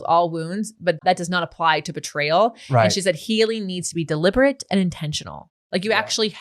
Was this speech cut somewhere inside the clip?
yes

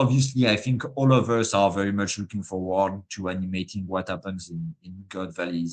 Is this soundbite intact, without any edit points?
yes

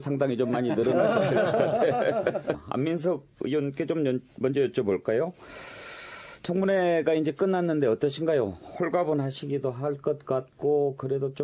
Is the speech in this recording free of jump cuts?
no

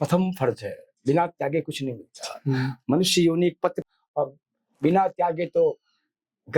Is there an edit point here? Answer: yes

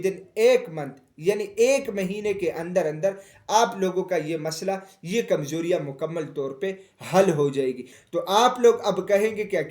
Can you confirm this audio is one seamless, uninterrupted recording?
no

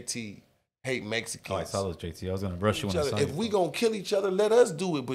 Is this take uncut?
no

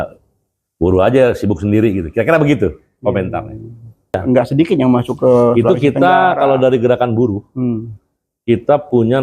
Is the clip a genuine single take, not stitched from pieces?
no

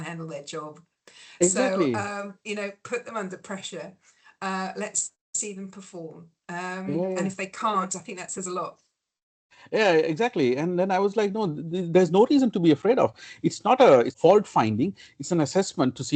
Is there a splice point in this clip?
no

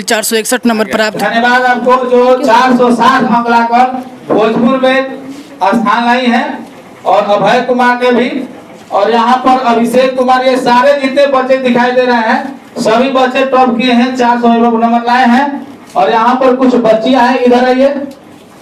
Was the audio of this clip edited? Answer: yes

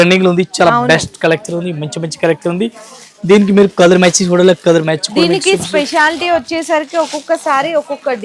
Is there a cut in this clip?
no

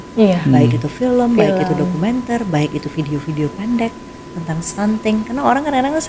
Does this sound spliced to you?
no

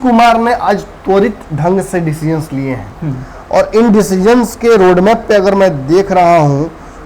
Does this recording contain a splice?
no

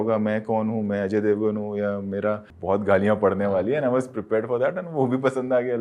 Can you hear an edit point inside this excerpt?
yes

